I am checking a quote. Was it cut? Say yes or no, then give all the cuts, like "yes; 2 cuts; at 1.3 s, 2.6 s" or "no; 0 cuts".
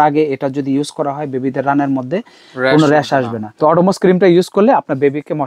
yes; 1 cut; at 3.4 s